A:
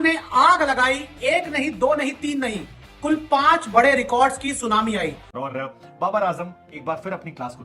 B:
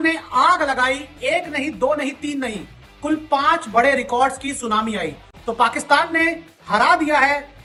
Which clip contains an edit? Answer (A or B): A